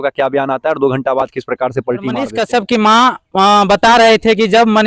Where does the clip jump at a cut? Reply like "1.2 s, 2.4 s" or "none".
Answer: 2.2 s